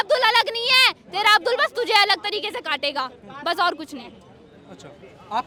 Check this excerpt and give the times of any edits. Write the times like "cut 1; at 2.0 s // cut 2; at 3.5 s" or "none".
none